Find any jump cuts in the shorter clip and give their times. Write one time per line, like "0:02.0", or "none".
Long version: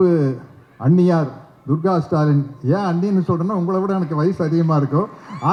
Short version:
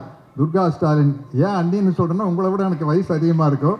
none

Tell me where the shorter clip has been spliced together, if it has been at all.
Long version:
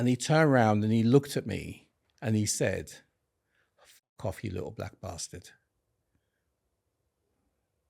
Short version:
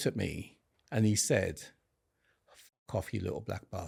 none

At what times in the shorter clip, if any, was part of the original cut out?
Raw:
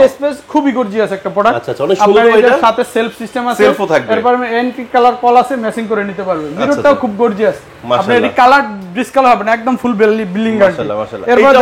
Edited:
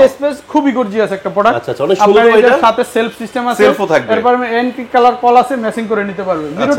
none

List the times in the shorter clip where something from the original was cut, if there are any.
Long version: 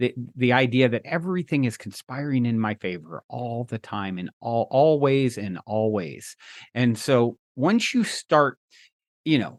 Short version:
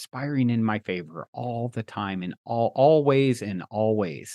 none

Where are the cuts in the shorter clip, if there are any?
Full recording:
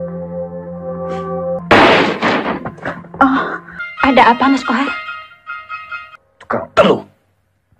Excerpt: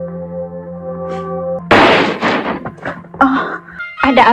none

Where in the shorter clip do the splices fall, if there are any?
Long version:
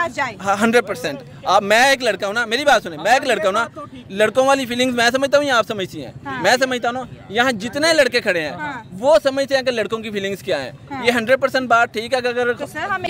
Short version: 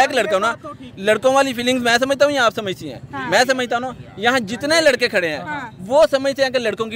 none

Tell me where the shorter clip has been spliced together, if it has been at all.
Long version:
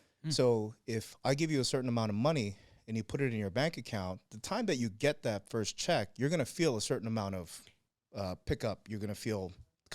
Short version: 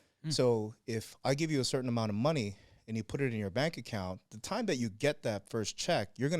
none

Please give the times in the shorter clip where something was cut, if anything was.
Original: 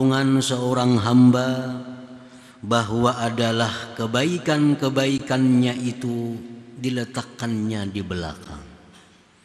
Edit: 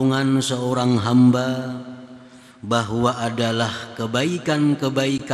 none

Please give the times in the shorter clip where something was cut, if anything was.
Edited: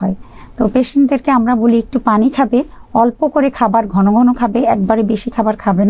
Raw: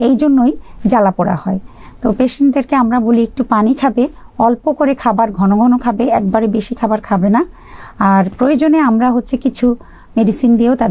none

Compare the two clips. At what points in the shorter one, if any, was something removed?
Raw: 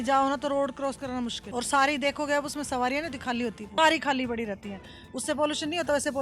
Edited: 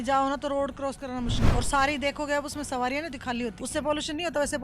0:03.6

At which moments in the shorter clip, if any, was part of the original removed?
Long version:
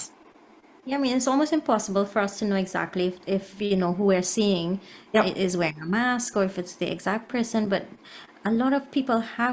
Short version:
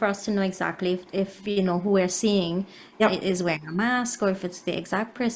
none

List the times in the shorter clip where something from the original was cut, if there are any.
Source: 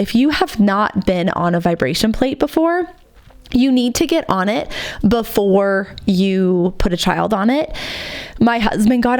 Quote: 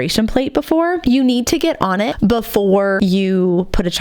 0:01.0
0:02.1
0:03.0

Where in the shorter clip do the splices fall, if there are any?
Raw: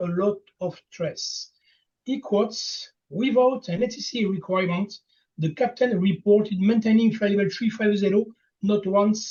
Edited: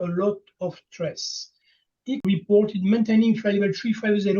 0:02.2

